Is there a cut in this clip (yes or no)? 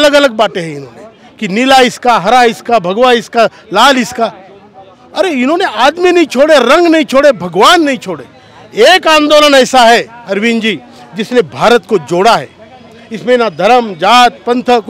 no